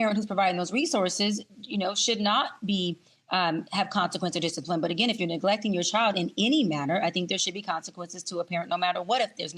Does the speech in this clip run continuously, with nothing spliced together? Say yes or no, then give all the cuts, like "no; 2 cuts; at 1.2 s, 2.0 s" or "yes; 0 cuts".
no; 1 cut; at 4.9 s